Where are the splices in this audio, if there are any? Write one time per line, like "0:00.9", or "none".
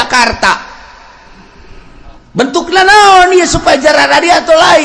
none